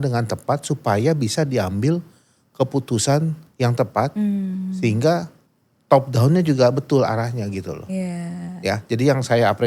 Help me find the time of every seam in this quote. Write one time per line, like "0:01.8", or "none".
none